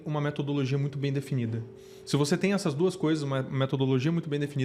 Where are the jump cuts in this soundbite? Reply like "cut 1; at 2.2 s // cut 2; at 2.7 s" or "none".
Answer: none